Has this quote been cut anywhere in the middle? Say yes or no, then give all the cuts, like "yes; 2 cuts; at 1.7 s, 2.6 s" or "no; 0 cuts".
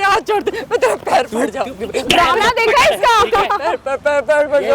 no; 0 cuts